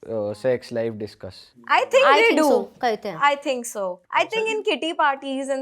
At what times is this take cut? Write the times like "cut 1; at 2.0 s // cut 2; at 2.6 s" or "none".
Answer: cut 1; at 1.6 s // cut 2; at 4.0 s

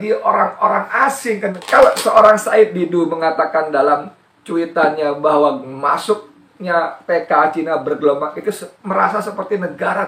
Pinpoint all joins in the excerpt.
cut 1; at 1.6 s

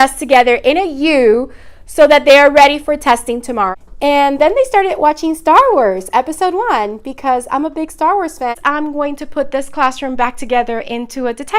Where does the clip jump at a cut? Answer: cut 1; at 3.7 s // cut 2; at 8.6 s

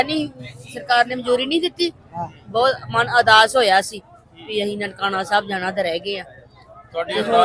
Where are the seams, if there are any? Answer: none

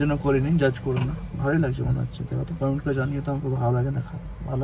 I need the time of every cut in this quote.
none

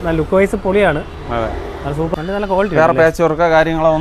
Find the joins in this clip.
cut 1; at 2.1 s

